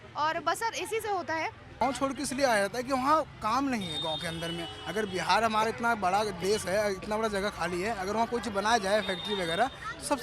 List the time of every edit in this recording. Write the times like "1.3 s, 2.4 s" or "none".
1.8 s